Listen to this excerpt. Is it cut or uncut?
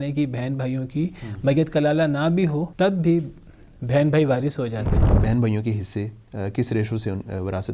cut